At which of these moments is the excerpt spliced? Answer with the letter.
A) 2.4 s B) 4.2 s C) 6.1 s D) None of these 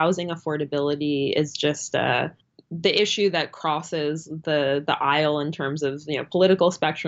A